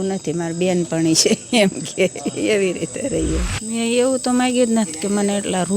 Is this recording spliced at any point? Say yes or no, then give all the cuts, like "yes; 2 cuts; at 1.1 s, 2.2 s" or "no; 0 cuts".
yes; 1 cut; at 3.5 s